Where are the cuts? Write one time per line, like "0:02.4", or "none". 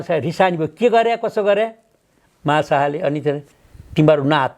none